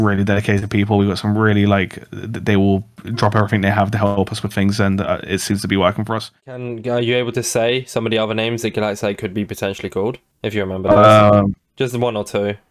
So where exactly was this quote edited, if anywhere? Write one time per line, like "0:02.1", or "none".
0:06.4